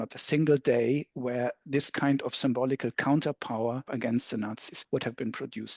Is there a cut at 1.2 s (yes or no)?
no